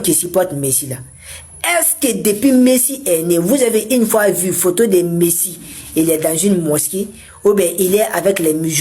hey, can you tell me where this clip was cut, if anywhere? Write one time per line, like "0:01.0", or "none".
none